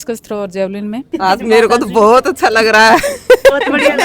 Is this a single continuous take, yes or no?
no